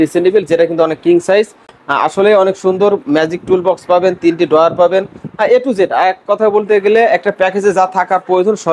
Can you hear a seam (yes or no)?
no